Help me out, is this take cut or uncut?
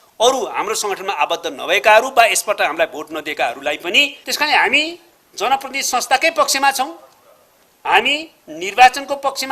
cut